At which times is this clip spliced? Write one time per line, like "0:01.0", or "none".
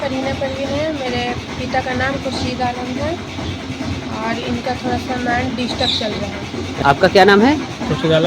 0:06.8